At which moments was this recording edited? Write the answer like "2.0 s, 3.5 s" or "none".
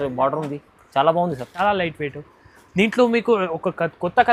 1.6 s